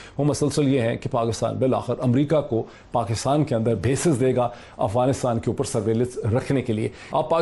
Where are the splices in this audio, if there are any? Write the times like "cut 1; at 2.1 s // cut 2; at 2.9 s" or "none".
none